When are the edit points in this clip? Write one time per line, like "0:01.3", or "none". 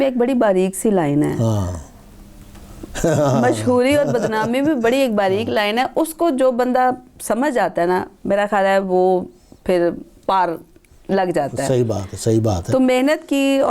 none